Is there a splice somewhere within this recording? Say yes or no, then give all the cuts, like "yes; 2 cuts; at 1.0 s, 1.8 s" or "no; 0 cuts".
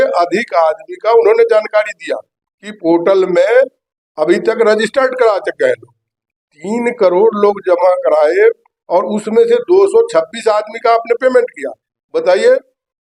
no; 0 cuts